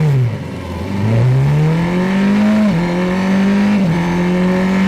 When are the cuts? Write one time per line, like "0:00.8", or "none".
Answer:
none